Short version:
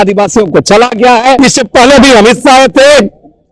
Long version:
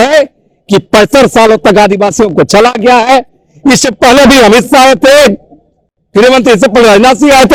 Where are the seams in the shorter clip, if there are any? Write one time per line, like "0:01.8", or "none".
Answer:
0:01.4